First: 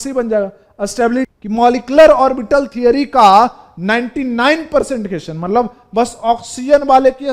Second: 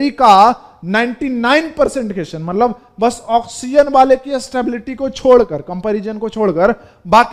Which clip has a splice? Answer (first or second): first